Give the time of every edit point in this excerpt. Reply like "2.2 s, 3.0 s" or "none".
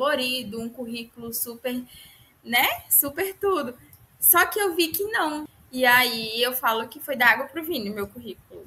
5.5 s